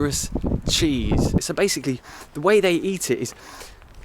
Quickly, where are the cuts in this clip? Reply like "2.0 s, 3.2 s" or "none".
1.4 s